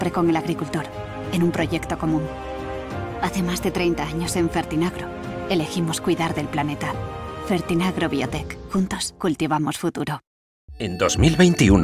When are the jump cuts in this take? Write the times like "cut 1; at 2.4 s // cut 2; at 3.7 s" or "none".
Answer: cut 1; at 10.9 s